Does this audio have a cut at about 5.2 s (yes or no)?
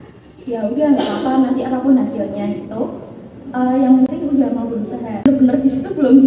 yes